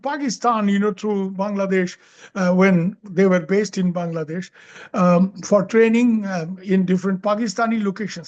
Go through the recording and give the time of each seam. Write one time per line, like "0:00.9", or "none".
none